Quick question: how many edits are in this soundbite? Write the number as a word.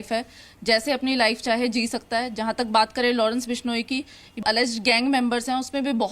one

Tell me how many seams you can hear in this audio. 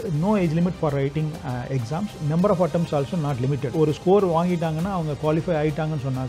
one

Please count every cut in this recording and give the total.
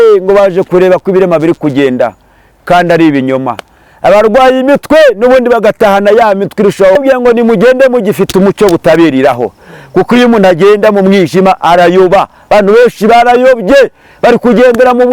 one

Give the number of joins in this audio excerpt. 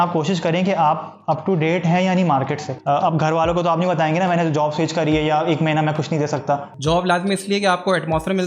two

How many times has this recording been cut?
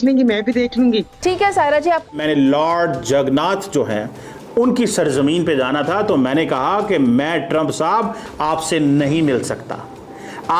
one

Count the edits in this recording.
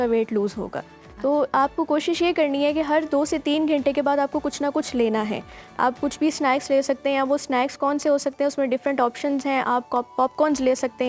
zero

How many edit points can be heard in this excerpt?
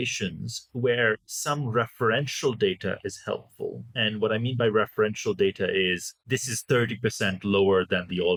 zero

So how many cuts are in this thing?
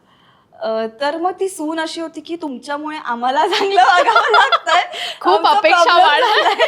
zero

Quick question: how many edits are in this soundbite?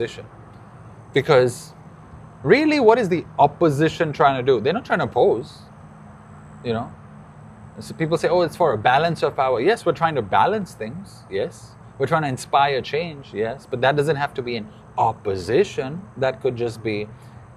zero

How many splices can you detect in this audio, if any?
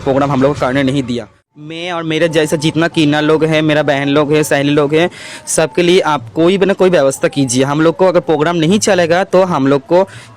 one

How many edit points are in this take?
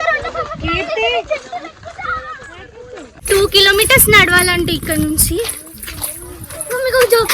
one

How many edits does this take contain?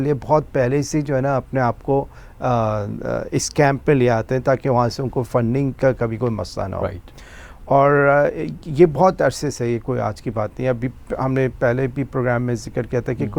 zero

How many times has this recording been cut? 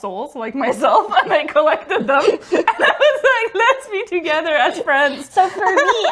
zero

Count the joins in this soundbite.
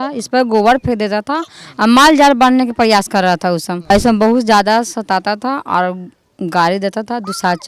one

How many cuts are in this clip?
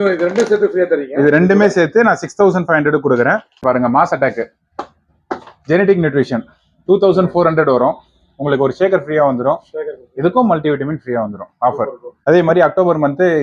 two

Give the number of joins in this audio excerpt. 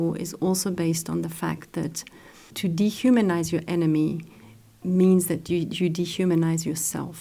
zero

